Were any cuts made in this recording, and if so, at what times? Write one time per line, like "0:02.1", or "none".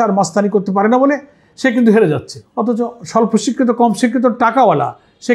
none